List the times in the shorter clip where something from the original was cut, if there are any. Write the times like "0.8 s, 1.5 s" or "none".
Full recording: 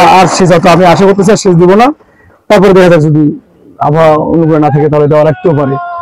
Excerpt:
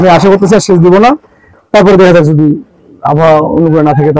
none